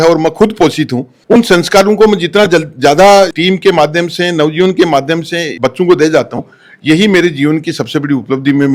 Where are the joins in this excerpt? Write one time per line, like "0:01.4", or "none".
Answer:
none